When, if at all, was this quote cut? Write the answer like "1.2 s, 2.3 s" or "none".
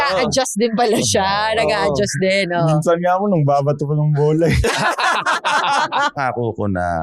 6.1 s